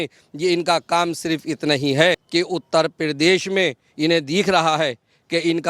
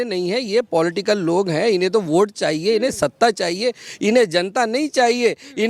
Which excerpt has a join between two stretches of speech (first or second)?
first